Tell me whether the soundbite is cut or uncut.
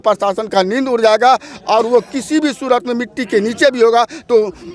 uncut